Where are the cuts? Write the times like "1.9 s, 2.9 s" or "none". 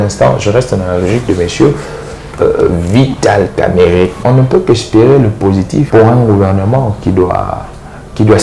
4.2 s, 5.9 s